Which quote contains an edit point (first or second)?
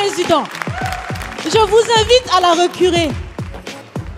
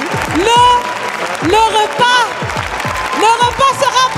first